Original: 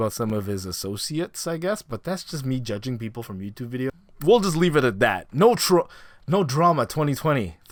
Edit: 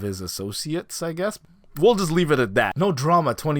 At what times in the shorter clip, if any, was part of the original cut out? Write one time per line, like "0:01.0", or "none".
0:01.5
0:02.7